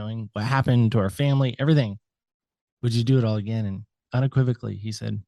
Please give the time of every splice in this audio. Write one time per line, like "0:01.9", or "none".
0:04.0